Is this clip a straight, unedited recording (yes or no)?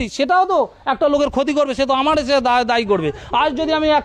yes